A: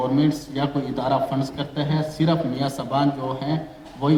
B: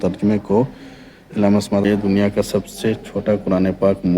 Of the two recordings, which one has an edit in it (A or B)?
B